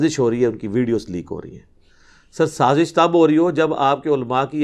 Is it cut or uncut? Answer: uncut